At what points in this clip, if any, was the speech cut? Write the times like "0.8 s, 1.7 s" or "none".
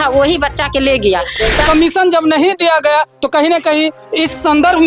1.6 s